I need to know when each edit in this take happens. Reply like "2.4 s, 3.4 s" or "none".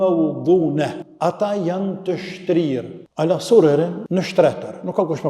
1.0 s, 3.0 s, 4.0 s